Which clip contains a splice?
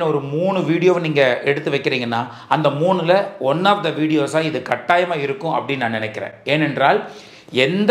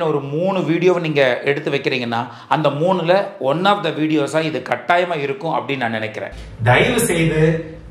second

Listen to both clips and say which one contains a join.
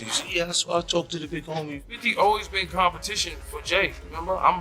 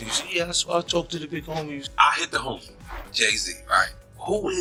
first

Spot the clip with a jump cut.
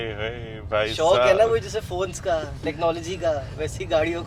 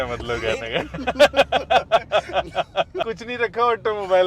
second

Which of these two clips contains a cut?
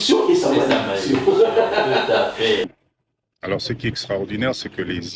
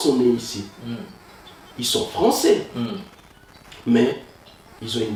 first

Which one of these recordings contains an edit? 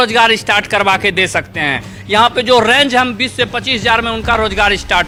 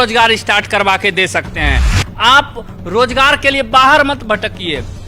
second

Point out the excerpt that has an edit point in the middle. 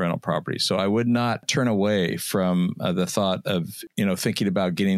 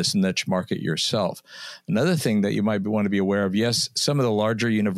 first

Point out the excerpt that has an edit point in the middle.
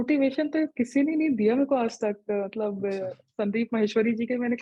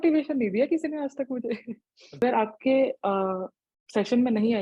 second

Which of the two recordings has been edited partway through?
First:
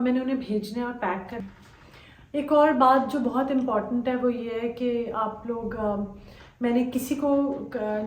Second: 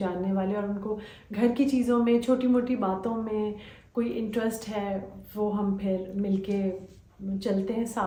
first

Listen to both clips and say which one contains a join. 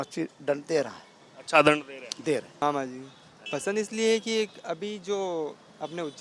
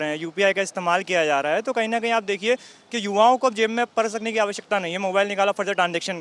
first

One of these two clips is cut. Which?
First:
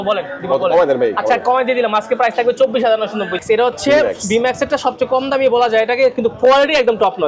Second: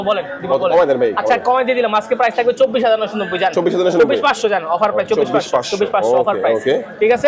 first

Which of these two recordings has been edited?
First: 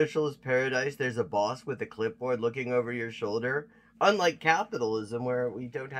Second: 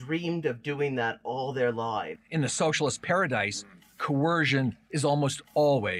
second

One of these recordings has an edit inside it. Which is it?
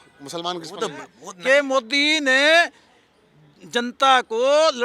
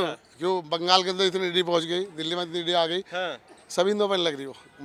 first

